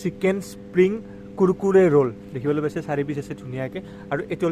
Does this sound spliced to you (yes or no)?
no